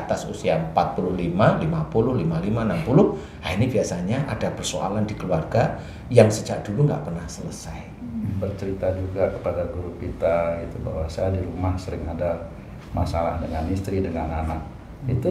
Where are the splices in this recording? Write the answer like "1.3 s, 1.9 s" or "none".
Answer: 8.3 s